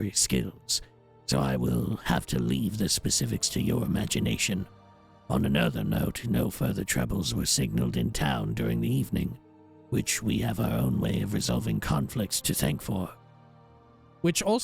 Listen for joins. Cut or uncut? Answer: cut